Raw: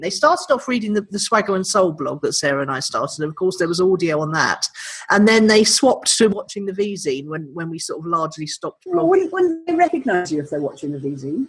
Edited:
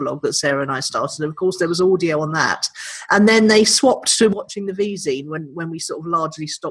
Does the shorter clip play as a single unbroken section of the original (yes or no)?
yes